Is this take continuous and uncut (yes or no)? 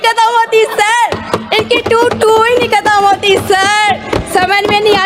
yes